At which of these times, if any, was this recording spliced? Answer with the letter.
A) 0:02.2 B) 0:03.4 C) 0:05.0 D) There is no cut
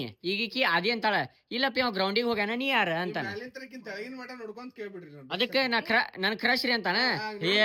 D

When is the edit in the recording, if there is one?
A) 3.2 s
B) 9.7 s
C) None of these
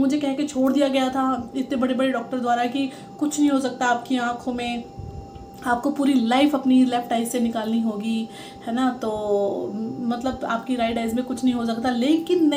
C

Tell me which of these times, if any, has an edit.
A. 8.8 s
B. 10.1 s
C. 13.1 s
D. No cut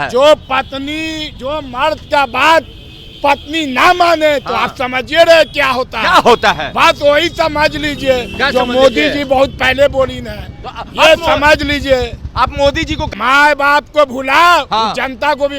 C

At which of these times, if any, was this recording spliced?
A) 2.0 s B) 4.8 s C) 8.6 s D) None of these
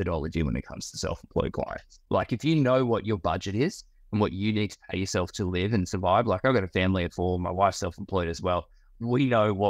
A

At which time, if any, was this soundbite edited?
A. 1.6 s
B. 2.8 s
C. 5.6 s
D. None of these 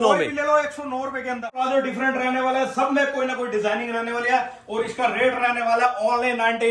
A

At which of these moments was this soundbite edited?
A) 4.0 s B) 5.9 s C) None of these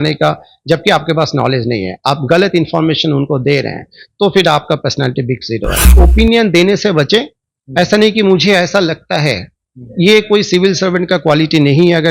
B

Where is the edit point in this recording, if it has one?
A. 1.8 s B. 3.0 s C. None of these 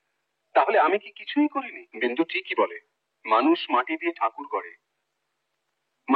A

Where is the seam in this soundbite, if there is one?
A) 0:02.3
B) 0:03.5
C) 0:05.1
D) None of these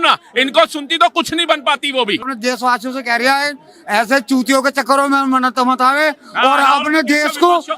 A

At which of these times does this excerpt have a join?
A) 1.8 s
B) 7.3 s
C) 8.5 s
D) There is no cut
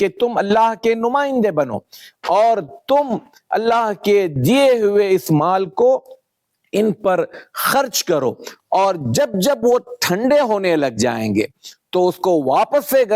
C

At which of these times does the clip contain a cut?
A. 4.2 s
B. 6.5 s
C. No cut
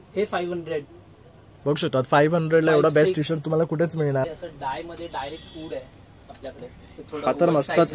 A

